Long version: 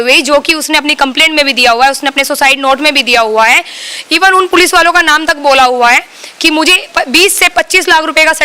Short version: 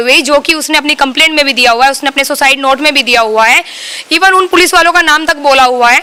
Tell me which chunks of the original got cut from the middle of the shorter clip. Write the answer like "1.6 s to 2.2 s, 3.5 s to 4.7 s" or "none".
none